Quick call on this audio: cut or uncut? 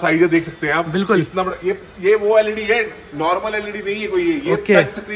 uncut